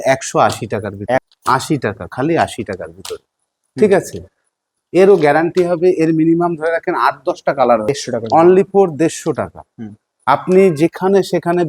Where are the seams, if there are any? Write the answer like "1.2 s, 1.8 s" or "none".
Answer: 1.3 s, 7.8 s